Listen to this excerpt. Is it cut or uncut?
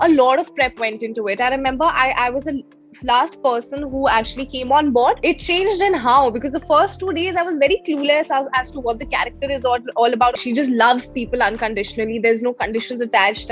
cut